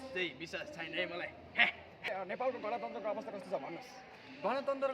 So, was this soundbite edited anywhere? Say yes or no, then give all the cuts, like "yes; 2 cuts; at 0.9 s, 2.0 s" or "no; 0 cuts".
yes; 1 cut; at 2.1 s